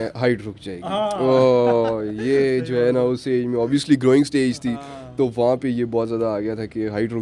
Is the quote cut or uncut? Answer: uncut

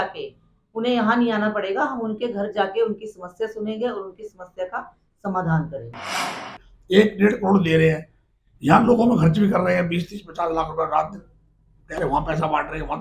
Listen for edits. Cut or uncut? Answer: cut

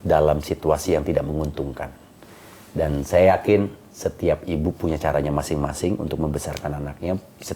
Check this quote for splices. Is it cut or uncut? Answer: uncut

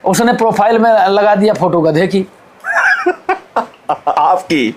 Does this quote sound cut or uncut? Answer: uncut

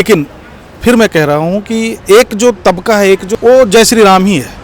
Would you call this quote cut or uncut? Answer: cut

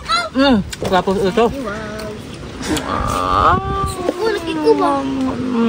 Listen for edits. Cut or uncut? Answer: uncut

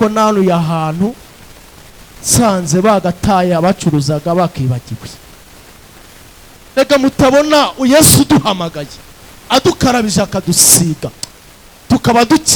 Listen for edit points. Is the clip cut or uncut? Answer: uncut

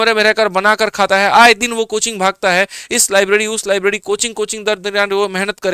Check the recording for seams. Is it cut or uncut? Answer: uncut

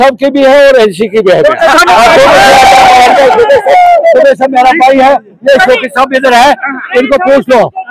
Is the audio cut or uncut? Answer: uncut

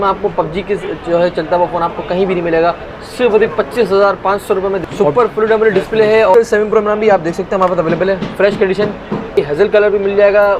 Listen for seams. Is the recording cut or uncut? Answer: cut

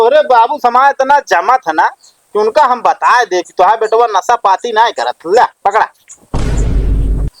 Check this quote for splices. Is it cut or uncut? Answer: cut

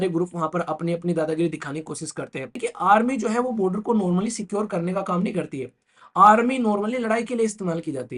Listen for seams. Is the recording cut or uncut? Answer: cut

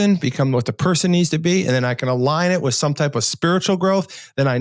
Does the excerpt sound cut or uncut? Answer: uncut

